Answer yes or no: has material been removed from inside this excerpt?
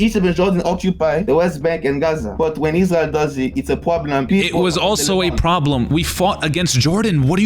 yes